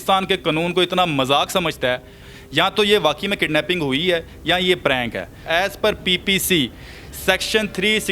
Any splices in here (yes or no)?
yes